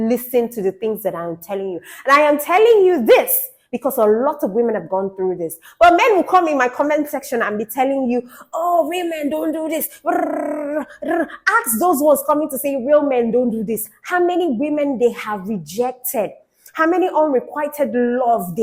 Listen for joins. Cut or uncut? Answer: uncut